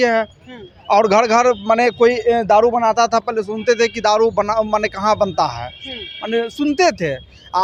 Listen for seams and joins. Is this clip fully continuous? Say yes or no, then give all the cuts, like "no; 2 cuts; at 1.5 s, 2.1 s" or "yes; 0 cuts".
yes; 0 cuts